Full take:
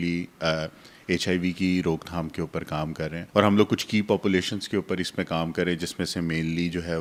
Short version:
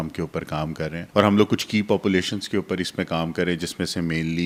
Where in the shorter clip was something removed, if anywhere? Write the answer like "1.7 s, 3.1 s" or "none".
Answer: none